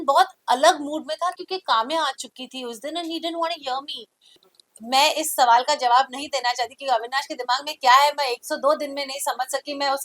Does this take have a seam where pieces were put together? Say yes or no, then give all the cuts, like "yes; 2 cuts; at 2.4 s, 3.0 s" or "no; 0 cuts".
yes; 1 cut; at 4.5 s